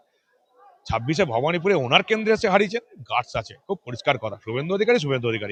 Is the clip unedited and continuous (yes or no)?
yes